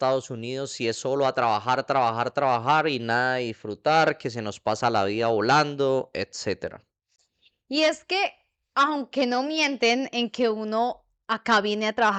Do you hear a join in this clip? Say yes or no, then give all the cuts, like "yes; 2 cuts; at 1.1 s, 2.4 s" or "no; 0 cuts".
no; 0 cuts